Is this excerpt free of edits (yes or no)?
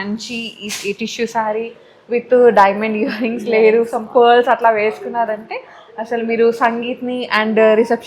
yes